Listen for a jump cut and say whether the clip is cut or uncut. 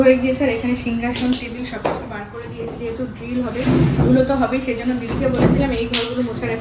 uncut